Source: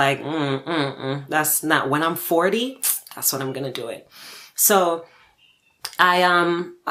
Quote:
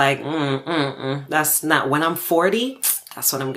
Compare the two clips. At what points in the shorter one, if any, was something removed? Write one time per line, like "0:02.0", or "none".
none